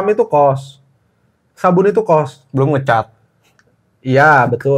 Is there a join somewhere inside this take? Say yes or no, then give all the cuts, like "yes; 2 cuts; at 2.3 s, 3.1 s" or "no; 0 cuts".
no; 0 cuts